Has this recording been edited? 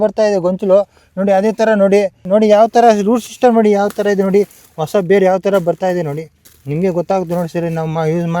no; 0 cuts

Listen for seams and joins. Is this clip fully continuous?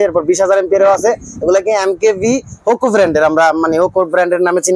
yes; 0 cuts

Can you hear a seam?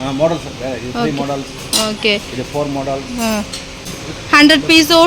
yes; 1 cut; at 3.8 s

